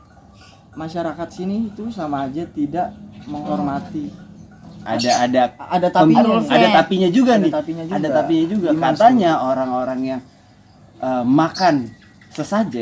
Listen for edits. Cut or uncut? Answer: cut